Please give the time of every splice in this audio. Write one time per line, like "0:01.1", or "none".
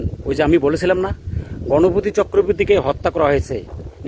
none

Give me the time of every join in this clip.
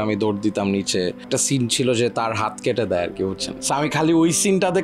0:01.3
0:03.5

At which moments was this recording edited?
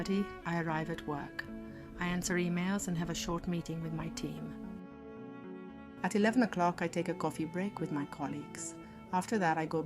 0:04.5
0:06.0

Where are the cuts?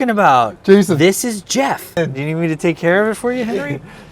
0:02.0

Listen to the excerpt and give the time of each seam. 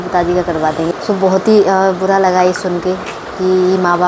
0:00.9

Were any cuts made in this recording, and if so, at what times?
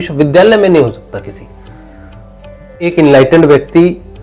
0:02.9

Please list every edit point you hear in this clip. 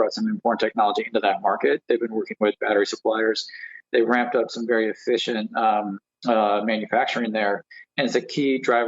none

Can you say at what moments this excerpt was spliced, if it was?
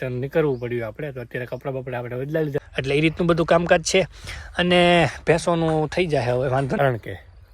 0:02.6
0:06.8

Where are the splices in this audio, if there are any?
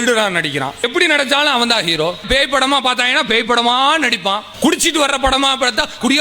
0:00.8
0:02.2
0:04.5

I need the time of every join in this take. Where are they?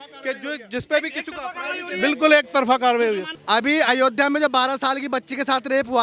0:03.3

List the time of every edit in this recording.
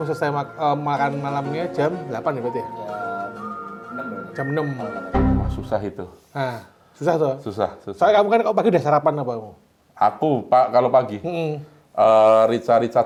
none

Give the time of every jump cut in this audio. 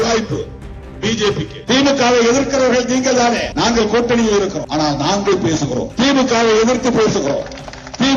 0:01.6
0:03.5
0:04.6
0:05.9

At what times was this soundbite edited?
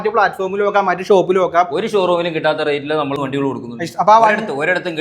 0:03.2

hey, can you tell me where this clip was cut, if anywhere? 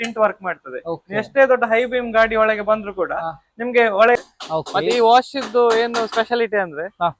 0:04.2

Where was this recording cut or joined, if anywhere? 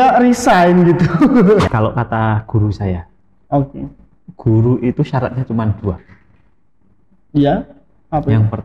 0:01.7

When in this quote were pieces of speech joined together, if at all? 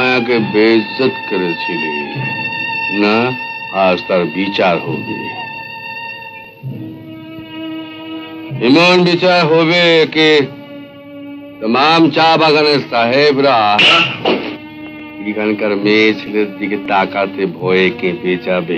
0:03.5

